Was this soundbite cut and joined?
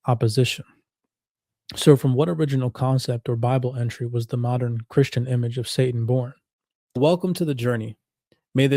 yes; 1 cut; at 7.0 s

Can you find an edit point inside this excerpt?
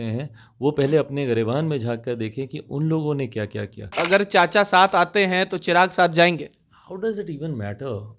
yes; 1 cut; at 4.0 s

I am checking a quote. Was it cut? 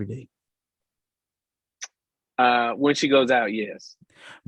no; 0 cuts

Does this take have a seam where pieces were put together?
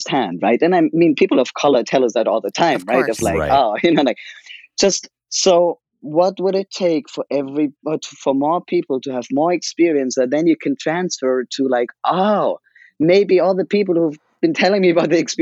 no; 0 cuts

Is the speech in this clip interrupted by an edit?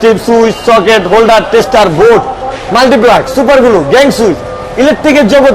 no; 0 cuts

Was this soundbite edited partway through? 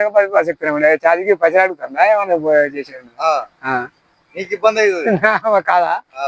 no; 0 cuts

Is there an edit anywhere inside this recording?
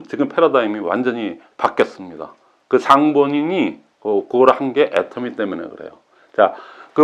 no; 0 cuts

